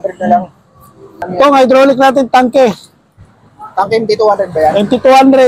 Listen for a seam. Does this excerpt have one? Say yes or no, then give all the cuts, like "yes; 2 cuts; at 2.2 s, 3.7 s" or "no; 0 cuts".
yes; 1 cut; at 1.3 s